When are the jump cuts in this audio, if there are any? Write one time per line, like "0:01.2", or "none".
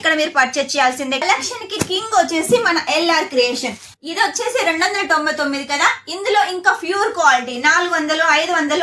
0:01.2
0:04.1